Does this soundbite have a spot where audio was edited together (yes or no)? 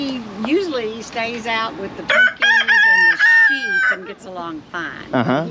no